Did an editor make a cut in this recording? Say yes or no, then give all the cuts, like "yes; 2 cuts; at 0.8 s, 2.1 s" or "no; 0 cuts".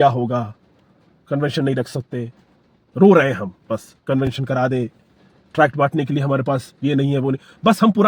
no; 0 cuts